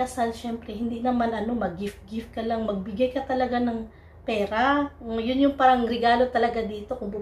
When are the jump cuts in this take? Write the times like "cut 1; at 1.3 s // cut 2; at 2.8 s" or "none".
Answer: none